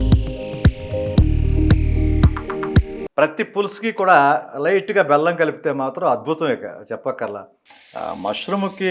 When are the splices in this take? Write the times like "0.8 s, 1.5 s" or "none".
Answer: 3.0 s, 7.7 s